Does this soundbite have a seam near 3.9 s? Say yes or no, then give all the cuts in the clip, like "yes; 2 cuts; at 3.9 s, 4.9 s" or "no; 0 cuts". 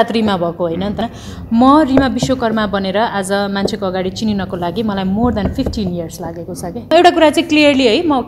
no; 2 cuts; at 1.0 s, 6.9 s